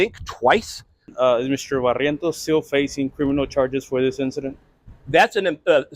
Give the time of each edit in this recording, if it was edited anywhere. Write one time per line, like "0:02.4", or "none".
0:01.0